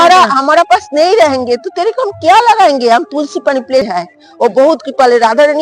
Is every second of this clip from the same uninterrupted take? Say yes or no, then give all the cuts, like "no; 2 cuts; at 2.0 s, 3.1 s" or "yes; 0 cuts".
no; 1 cut; at 3.9 s